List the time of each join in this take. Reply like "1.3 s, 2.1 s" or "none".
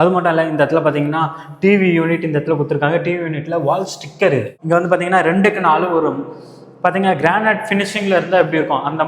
4.5 s